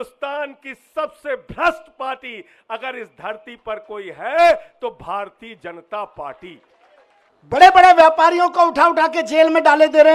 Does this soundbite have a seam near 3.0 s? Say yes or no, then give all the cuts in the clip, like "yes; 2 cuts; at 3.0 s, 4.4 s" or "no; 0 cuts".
no; 1 cut; at 7.4 s